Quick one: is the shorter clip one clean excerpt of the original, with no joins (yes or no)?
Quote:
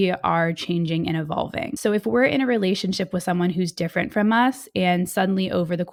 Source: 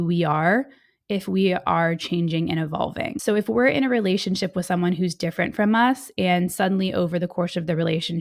yes